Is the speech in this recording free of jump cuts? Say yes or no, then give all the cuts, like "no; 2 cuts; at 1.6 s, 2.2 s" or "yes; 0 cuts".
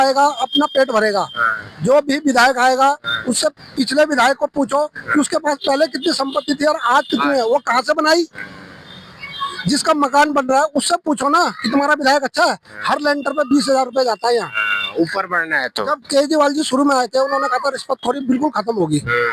yes; 0 cuts